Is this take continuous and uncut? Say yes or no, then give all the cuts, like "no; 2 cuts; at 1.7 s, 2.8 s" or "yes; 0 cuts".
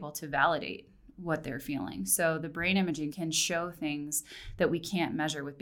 no; 1 cut; at 3.2 s